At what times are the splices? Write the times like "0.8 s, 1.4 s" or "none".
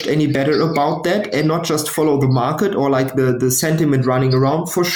none